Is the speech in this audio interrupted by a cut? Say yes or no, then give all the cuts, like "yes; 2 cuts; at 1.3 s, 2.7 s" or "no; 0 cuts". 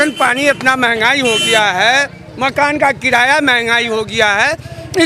no; 0 cuts